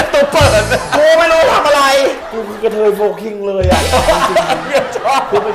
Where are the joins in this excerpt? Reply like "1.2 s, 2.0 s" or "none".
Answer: 2.2 s